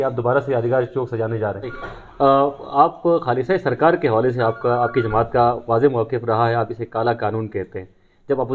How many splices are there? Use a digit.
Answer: 1